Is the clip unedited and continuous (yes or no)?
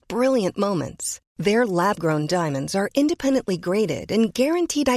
yes